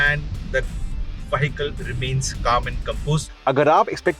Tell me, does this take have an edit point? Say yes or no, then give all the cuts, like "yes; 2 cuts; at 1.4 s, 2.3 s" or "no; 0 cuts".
yes; 1 cut; at 3.2 s